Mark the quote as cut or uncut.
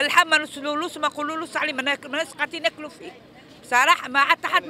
uncut